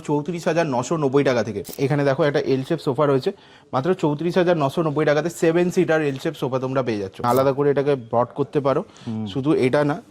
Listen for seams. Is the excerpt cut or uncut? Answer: cut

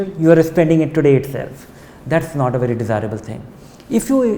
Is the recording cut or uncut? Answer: uncut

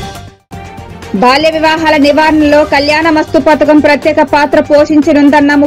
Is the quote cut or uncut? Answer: cut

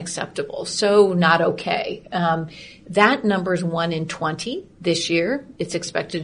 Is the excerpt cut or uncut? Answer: cut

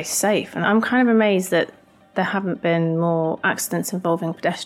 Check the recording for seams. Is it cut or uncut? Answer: uncut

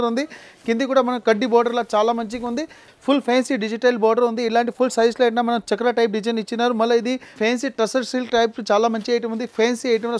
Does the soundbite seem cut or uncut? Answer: cut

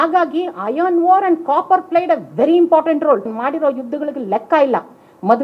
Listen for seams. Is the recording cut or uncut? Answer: cut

